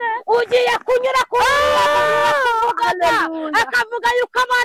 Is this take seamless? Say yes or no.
yes